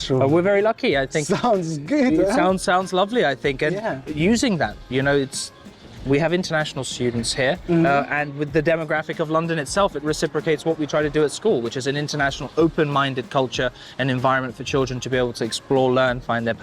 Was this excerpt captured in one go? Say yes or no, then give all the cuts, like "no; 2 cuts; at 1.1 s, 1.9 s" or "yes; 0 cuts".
yes; 0 cuts